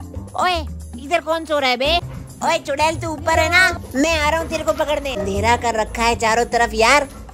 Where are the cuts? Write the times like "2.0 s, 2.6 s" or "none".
2.2 s, 5.2 s